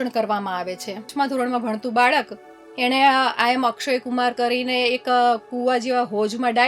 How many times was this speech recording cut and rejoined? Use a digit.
1